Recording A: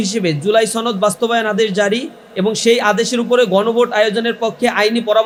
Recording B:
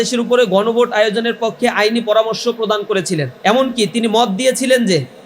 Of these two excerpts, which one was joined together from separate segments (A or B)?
B